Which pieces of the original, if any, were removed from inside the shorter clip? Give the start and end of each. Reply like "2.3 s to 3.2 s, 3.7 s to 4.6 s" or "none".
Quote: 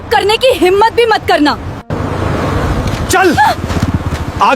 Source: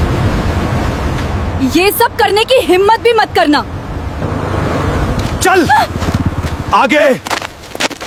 3.8 s to 4.1 s